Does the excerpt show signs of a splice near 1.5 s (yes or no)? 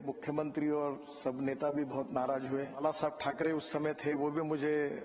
no